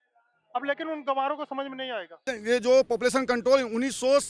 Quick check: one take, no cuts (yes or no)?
no